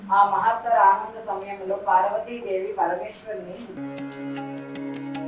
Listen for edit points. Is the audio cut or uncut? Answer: cut